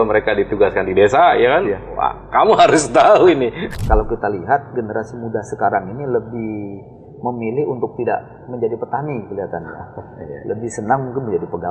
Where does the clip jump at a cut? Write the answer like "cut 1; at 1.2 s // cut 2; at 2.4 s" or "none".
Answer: cut 1; at 3.7 s